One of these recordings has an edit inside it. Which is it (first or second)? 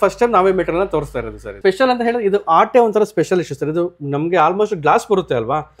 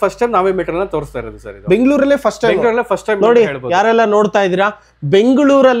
first